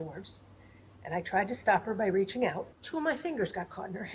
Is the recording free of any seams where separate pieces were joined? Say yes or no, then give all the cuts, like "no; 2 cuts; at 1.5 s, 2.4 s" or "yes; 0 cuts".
no; 1 cut; at 2.8 s